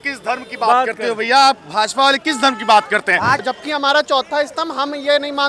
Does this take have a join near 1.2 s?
no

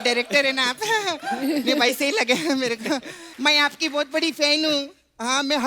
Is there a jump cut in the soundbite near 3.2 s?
yes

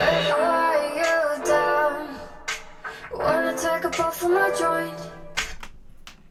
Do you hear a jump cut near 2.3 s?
no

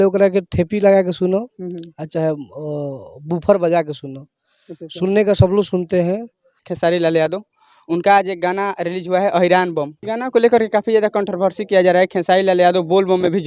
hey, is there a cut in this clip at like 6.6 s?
yes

